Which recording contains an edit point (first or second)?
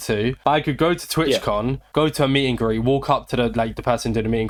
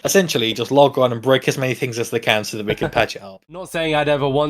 second